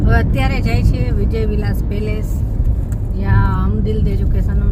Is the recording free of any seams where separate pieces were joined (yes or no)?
yes